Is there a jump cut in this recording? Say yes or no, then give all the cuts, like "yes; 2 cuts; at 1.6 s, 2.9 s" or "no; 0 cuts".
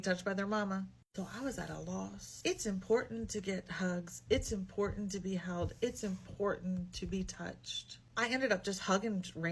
no; 0 cuts